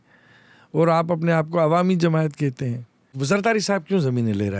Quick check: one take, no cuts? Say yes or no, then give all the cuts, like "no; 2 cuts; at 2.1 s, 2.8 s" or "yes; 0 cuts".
no; 1 cut; at 3.1 s